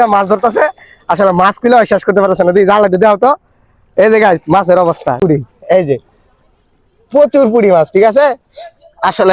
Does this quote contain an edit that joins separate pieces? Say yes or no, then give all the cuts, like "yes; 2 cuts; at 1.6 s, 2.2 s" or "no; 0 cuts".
yes; 1 cut; at 5.2 s